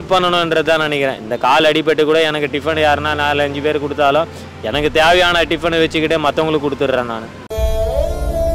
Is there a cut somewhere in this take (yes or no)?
no